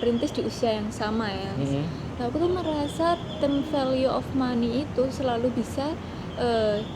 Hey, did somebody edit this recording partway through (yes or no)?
no